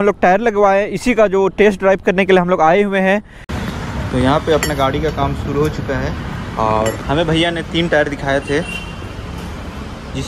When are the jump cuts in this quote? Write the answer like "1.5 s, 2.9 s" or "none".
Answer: 3.4 s